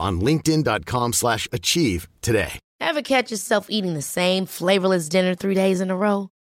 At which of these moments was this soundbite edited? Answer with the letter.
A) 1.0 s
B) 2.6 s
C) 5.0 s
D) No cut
B